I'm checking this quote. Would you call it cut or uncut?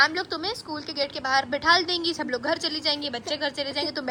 uncut